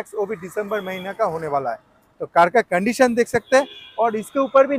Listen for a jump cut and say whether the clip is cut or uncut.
uncut